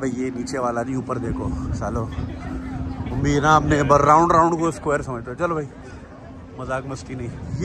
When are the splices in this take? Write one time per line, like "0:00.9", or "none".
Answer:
none